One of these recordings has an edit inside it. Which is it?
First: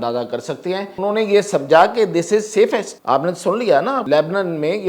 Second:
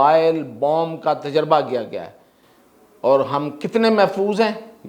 first; 3 cuts; at 1.0 s, 2.9 s, 4.0 s

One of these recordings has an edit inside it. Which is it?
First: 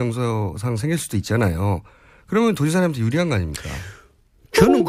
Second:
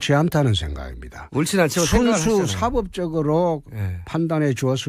second; 1 cut; at 3.1 s

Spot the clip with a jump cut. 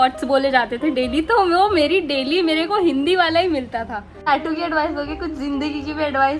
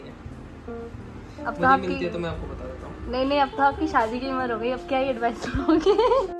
first; 1 cut; at 4.3 s

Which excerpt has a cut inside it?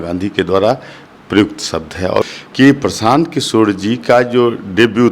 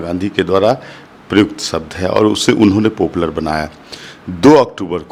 first; 1 cut; at 2.2 s

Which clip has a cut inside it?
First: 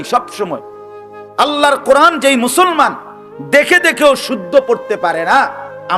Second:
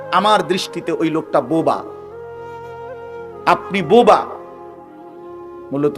second; 2 cuts; at 1.9 s, 3.4 s

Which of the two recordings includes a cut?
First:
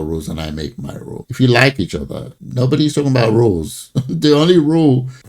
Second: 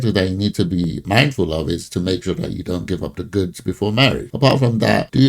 second; 2 cuts; at 1.0 s, 4.3 s

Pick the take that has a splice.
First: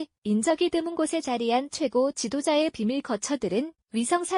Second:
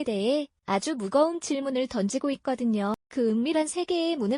second; 1 cut; at 2.9 s

